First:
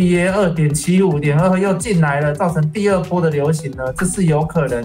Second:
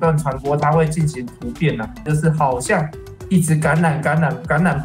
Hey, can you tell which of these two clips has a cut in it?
second; 1 cut; at 2.0 s

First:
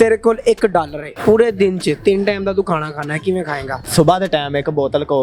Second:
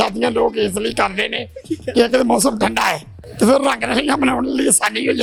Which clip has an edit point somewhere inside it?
first; 2 cuts; at 1.0 s, 3.8 s

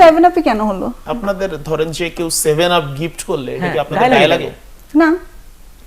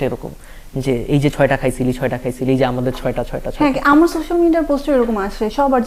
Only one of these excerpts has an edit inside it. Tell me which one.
first; 1 cut; at 1.0 s

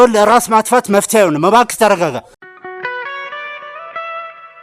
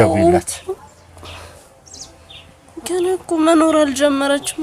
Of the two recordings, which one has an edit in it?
first; 1 cut; at 2.4 s

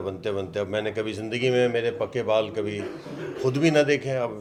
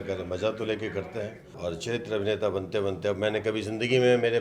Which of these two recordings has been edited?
second; 1 cut; at 1.4 s

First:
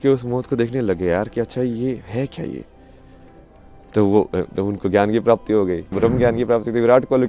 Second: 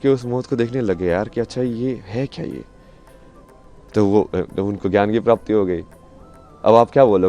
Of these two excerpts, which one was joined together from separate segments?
first; 1 cut; at 5.9 s

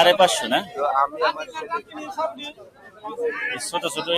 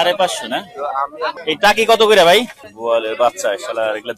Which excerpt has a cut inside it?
second; 2 cuts; at 1.4 s, 2.6 s

